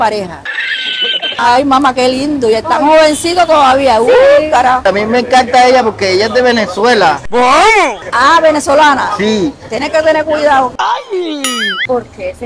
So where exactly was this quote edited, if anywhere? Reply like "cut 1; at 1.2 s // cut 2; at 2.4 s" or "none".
cut 1; at 1.3 s // cut 2; at 4.8 s